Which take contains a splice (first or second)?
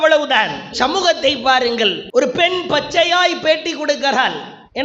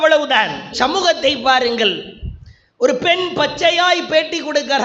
first